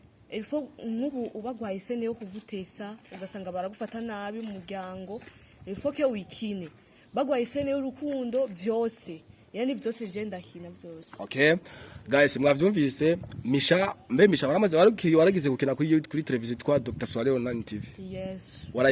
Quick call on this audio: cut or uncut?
uncut